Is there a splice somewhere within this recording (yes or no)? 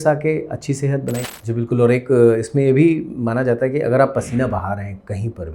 yes